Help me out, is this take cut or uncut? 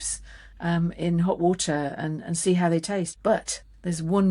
cut